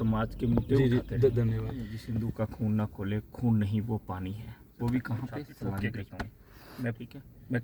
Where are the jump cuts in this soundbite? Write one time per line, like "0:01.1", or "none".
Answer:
0:02.0
0:06.1